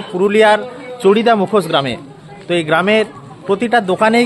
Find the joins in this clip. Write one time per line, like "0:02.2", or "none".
none